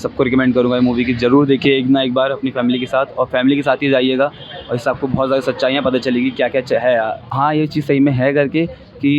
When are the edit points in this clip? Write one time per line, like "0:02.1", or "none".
none